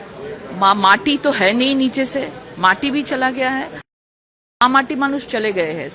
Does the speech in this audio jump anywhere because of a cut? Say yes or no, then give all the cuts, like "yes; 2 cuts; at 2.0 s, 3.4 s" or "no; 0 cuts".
yes; 1 cut; at 4.0 s